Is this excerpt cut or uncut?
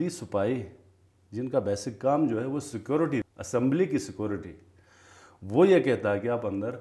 cut